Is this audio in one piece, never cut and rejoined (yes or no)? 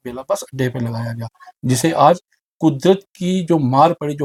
yes